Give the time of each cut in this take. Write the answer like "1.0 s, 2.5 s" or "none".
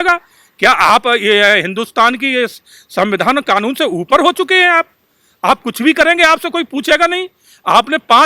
none